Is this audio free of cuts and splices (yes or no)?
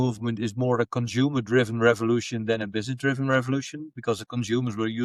yes